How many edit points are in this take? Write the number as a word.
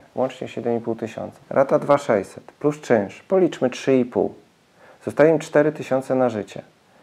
one